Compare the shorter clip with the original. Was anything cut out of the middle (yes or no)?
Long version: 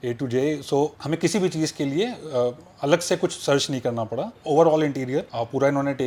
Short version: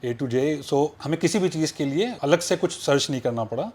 yes